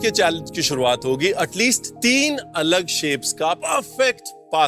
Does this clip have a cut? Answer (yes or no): yes